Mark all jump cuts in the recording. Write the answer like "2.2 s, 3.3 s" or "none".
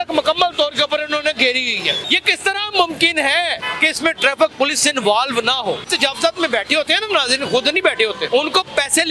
2.0 s, 3.6 s, 5.9 s, 8.2 s